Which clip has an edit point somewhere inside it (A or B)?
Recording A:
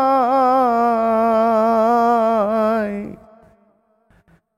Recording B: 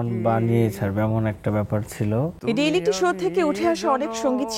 B